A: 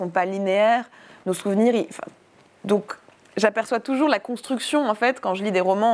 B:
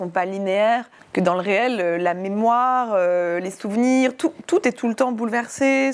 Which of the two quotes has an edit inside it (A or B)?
B